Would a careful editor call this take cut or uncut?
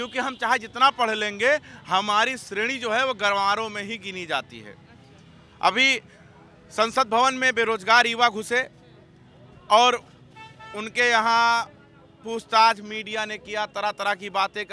uncut